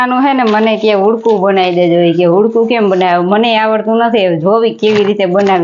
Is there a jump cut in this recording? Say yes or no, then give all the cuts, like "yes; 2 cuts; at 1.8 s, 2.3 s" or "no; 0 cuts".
no; 0 cuts